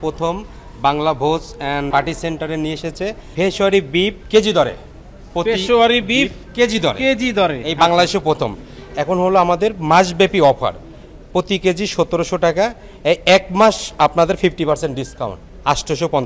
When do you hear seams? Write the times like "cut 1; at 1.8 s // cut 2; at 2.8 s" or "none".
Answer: cut 1; at 1.9 s